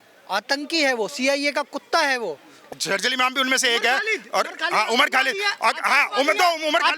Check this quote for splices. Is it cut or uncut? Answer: cut